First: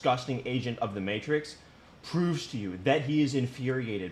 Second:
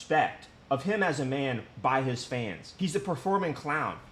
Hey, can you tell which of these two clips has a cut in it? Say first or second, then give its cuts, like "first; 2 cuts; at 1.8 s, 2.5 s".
second; 1 cut; at 2.6 s